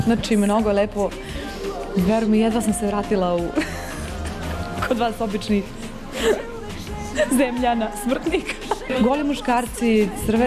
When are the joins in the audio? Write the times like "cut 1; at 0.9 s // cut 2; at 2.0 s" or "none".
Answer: none